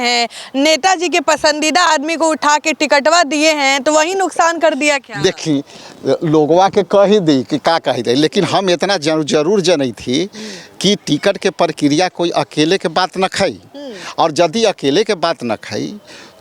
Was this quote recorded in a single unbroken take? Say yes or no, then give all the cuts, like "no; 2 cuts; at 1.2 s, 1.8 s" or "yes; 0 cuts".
yes; 0 cuts